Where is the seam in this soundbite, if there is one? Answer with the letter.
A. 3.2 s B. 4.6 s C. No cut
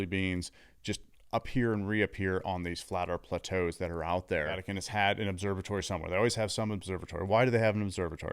B